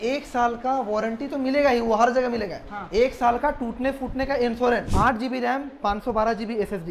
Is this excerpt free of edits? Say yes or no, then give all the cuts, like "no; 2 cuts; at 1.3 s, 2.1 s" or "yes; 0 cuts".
no; 1 cut; at 4.9 s